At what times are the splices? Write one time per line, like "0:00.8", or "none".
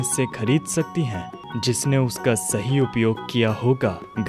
0:01.5